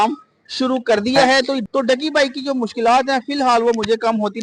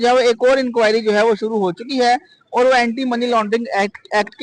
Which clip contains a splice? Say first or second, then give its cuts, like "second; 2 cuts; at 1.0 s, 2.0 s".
first; 1 cut; at 1.6 s